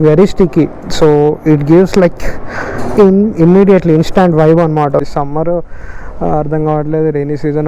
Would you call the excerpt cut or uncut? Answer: cut